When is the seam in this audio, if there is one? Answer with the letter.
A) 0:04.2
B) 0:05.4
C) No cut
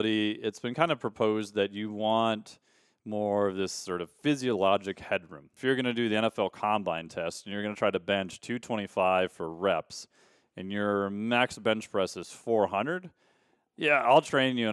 B